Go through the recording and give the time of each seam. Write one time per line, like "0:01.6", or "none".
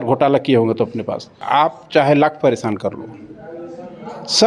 0:01.3